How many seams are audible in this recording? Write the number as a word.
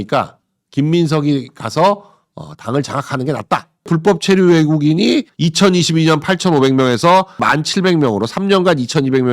three